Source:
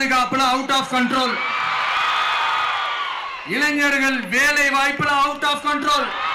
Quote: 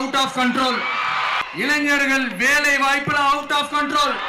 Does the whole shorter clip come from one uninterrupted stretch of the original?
no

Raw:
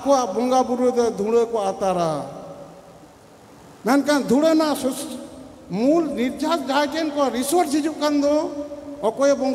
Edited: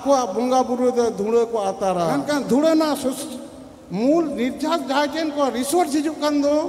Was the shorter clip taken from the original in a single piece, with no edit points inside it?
no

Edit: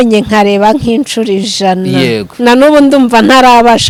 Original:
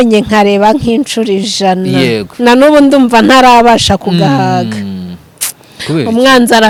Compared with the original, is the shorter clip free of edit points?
yes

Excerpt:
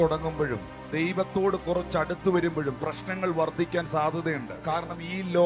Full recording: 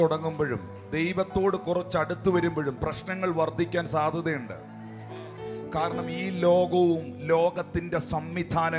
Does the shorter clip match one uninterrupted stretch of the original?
no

